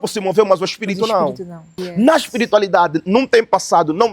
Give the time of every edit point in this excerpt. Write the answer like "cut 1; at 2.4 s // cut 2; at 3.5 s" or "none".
cut 1; at 1.8 s